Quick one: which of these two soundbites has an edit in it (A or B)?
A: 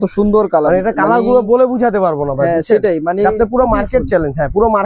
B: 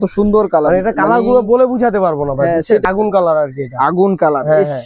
B